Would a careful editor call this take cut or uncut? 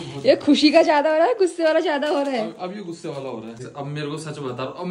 cut